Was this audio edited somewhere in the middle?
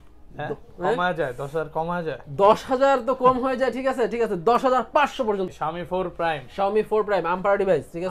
yes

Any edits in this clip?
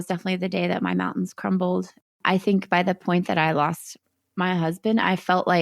yes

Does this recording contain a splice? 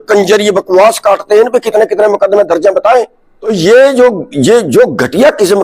yes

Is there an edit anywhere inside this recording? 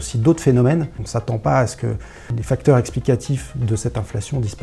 yes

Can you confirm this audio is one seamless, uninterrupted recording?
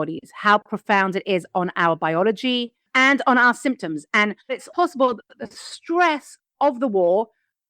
no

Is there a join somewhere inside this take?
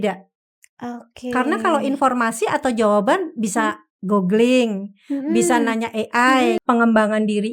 yes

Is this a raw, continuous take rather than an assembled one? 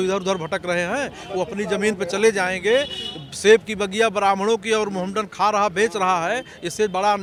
yes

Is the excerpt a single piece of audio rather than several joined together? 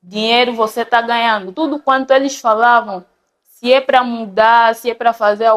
no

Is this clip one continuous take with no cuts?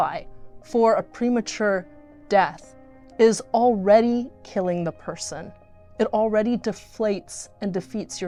yes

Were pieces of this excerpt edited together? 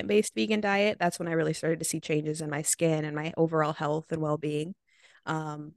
no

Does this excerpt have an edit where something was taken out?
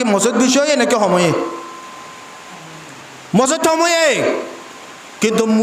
no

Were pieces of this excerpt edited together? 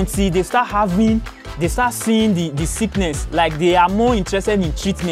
no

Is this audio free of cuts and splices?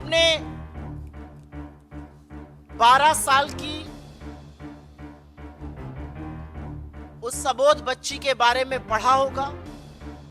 no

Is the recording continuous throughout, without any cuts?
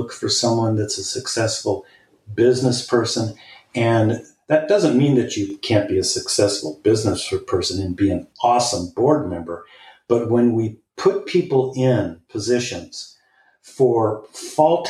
yes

